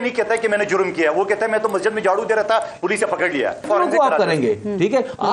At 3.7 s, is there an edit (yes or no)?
yes